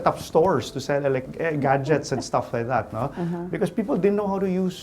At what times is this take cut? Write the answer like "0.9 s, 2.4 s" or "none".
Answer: 1.3 s